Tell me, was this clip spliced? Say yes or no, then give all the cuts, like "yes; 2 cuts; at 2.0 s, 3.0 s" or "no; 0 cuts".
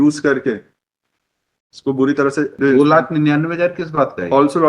yes; 1 cut; at 2.5 s